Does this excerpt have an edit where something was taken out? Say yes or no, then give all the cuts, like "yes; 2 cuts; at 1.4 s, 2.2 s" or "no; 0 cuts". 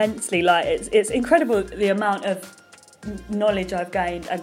no; 0 cuts